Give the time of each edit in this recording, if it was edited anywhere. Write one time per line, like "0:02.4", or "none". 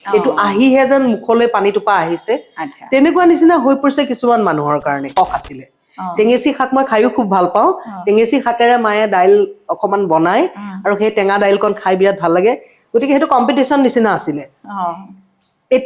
0:05.1